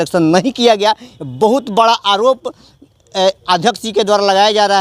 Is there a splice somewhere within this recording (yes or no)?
no